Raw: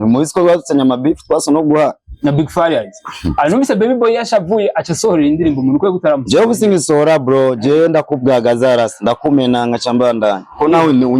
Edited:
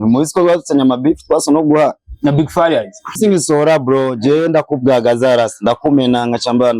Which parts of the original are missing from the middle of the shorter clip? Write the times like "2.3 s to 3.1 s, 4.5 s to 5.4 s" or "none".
3.2 s to 6.6 s

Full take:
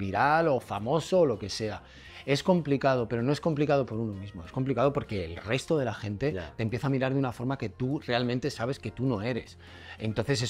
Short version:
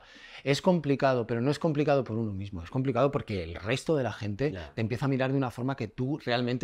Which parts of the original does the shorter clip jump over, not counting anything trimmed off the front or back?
none

